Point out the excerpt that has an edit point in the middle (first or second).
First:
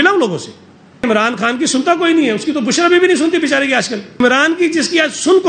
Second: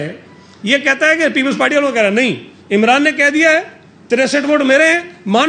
first